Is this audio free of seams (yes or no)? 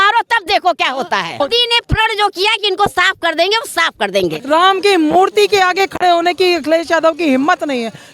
no